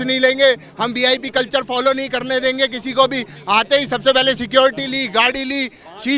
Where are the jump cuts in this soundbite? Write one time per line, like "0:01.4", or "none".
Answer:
none